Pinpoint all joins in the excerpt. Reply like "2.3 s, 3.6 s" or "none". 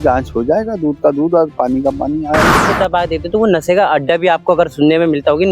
2.5 s